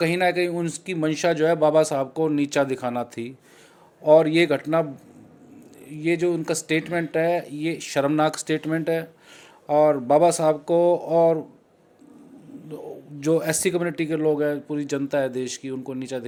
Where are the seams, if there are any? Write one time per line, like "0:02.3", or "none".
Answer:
none

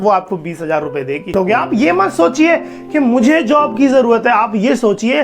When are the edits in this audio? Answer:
0:01.3

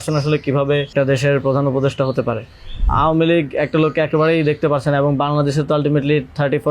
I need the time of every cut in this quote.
0:00.9
0:02.8

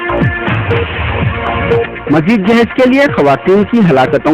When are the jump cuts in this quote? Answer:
0:01.6

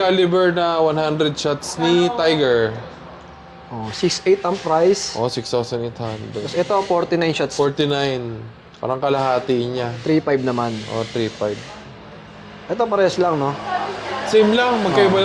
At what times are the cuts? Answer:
none

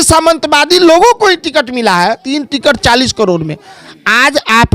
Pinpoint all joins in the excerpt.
0:02.2

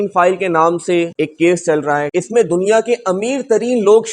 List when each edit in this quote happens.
0:01.1
0:02.1

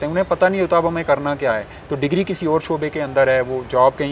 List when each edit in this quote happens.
none

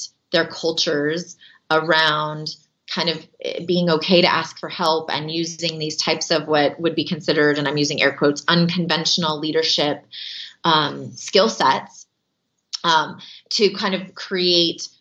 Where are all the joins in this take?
none

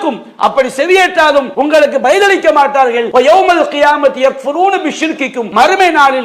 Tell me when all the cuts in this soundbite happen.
0:01.5
0:03.0
0:05.4

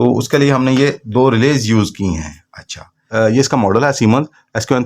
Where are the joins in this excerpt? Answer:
0:02.9

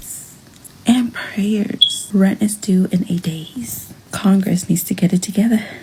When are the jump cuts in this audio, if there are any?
none

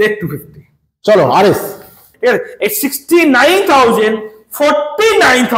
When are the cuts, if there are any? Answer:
0:02.1

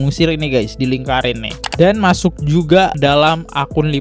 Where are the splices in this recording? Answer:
0:01.6

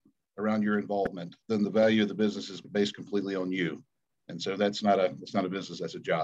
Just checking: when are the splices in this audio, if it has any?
0:01.5
0:02.7

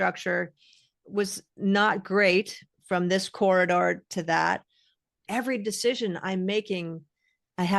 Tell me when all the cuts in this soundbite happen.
0:05.2

